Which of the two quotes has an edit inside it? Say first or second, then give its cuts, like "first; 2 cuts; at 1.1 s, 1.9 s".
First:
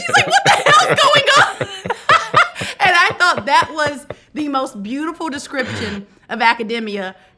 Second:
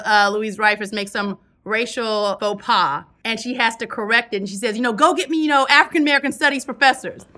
second; 1 cut; at 3.1 s